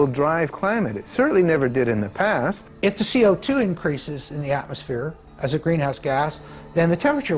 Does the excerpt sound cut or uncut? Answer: cut